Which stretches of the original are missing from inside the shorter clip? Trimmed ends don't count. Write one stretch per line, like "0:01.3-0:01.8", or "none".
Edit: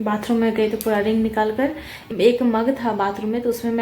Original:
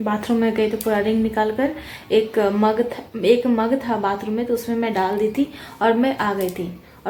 0:02.0-0:03.0